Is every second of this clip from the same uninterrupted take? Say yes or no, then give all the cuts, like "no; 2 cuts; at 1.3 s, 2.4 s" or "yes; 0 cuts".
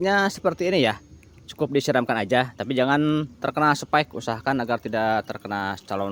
yes; 0 cuts